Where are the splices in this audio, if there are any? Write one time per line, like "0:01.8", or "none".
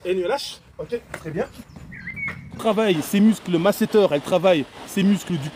0:02.6